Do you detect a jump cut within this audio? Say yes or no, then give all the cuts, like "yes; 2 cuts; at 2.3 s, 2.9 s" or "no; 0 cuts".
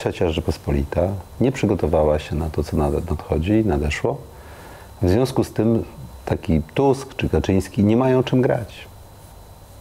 no; 0 cuts